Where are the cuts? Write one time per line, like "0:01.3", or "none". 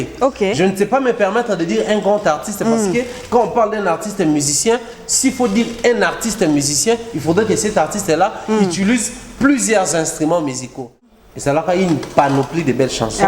0:11.0